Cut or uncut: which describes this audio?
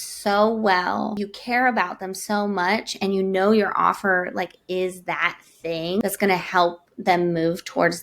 cut